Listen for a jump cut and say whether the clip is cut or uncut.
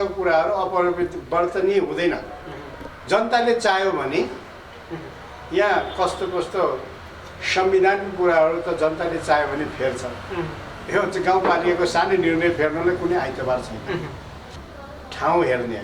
cut